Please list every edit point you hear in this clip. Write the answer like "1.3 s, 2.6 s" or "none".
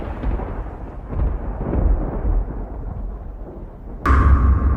3.7 s